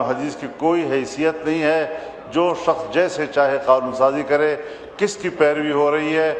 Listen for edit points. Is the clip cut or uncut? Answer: uncut